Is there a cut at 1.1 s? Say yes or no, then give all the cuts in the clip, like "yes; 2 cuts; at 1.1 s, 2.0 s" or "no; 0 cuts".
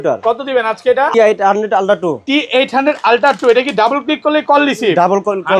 yes; 1 cut; at 1.1 s